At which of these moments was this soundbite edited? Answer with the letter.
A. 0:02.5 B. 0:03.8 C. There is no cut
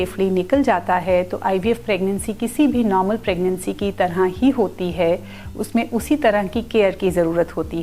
C